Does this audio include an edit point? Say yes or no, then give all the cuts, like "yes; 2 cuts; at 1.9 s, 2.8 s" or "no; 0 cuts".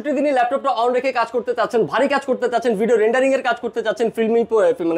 no; 0 cuts